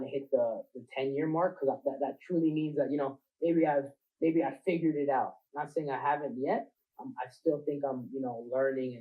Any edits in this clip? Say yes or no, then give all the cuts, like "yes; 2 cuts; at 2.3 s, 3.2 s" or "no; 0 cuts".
no; 0 cuts